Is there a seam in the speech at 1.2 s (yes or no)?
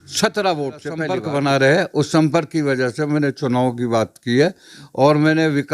yes